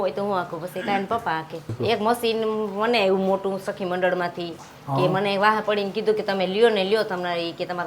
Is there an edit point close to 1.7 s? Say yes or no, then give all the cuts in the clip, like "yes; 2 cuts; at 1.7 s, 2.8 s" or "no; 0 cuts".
yes; 1 cut; at 1.7 s